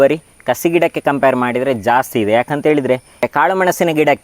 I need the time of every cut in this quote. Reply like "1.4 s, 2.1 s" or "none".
3.2 s